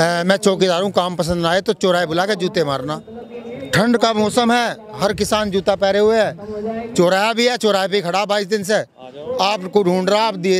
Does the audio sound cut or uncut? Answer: uncut